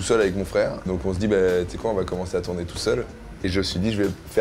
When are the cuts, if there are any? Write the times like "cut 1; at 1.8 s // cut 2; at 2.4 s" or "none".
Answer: cut 1; at 0.9 s // cut 2; at 3.2 s

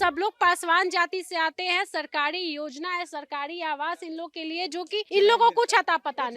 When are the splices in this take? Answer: cut 1; at 5.1 s

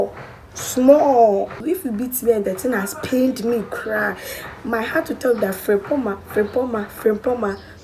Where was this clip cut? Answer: cut 1; at 1.5 s

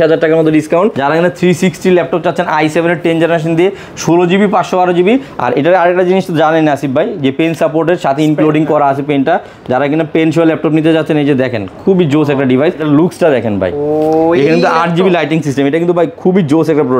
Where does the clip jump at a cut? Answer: cut 1; at 1.0 s // cut 2; at 12.8 s

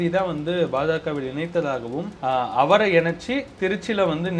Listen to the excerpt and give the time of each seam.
cut 1; at 2.1 s

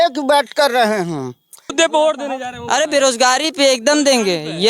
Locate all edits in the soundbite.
cut 1; at 1.7 s

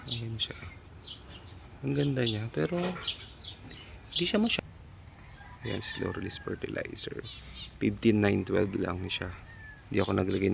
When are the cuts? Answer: cut 1; at 4.5 s

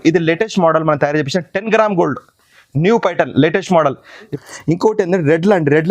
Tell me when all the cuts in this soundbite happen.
cut 1; at 4.3 s

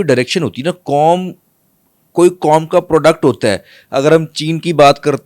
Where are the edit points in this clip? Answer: none

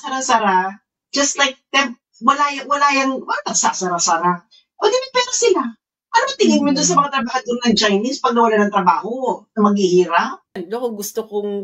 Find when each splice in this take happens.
cut 1; at 10.6 s

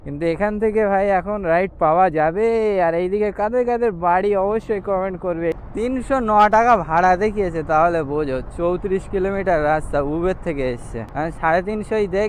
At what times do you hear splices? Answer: cut 1; at 5.6 s // cut 2; at 11.0 s

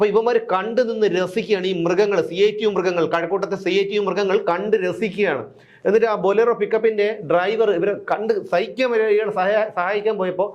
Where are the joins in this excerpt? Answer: none

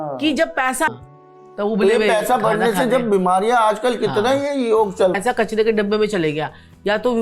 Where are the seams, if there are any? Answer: cut 1; at 0.9 s // cut 2; at 5.2 s

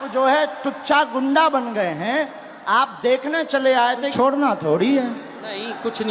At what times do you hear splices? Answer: cut 1; at 4.1 s

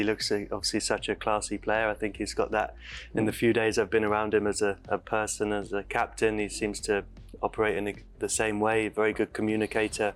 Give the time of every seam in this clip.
none

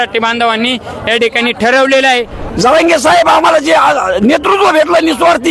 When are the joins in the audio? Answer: cut 1; at 2.4 s

